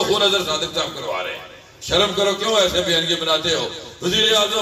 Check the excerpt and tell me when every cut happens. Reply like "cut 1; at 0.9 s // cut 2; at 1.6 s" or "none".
none